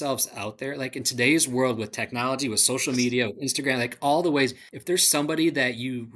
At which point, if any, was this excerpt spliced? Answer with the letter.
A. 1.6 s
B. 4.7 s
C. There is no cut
B